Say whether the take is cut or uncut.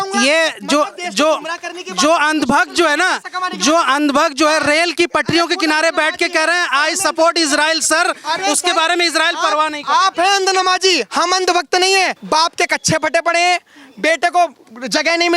cut